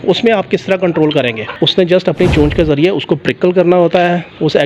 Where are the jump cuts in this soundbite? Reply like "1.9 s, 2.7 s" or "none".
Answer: 1.5 s